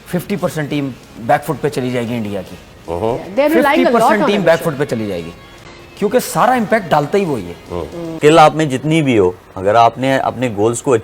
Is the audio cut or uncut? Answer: cut